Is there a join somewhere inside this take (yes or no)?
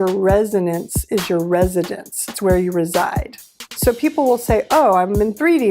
yes